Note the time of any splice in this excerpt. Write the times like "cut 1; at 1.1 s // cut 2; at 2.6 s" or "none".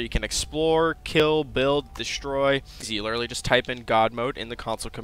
cut 1; at 2.9 s